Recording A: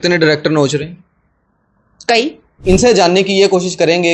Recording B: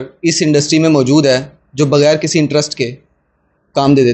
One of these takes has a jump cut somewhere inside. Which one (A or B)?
A